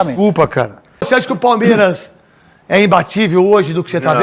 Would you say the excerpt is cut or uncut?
cut